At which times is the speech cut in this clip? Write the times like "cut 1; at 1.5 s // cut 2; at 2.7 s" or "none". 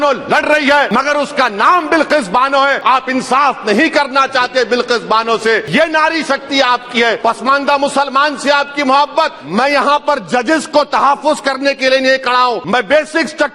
cut 1; at 0.9 s // cut 2; at 2.8 s // cut 3; at 5.7 s // cut 4; at 7.2 s // cut 5; at 9.4 s // cut 6; at 12.6 s

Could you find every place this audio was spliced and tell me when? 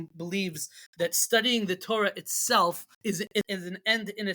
cut 1; at 3.3 s

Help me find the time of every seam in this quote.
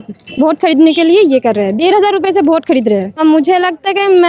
cut 1; at 3.2 s

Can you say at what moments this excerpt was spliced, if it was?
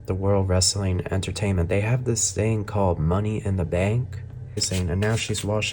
cut 1; at 4.7 s

